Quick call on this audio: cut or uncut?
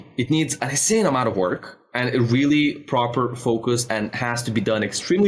uncut